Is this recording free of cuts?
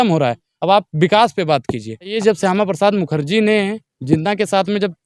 no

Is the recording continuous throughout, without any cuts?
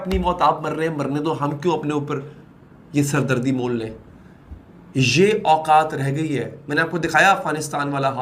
yes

